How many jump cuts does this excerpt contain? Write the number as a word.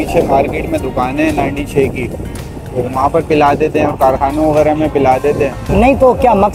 one